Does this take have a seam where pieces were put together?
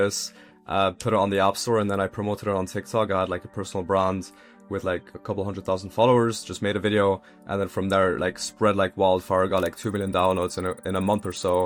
no; 0 cuts

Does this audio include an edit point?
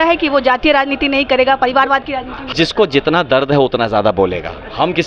yes; 1 cut; at 2.4 s

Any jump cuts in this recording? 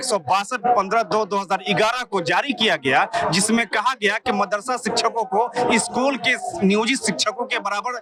no; 0 cuts

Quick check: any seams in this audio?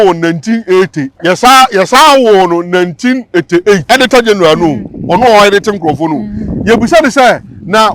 yes; 2 cuts; at 1.1 s, 3.8 s

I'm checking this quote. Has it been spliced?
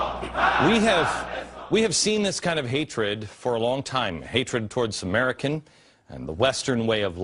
no; 0 cuts

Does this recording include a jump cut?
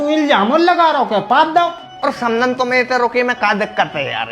yes; 1 cut; at 1.8 s

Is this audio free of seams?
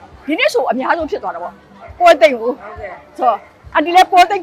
yes; 0 cuts

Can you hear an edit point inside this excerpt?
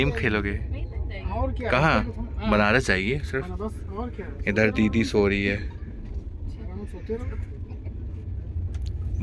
no; 0 cuts

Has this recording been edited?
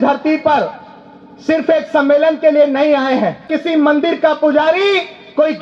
yes; 1 cut; at 3.5 s

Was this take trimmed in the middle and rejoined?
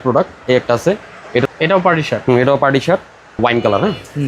yes; 2 cuts; at 1.4 s, 3.4 s

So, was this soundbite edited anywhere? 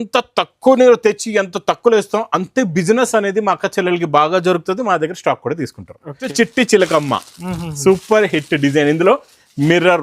yes; 1 cut; at 6.3 s

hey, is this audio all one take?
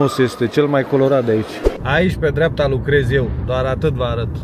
no; 1 cut; at 1.7 s

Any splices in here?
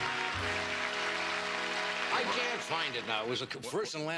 no; 0 cuts

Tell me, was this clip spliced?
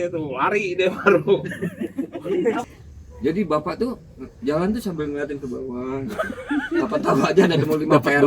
yes; 1 cut; at 2.6 s

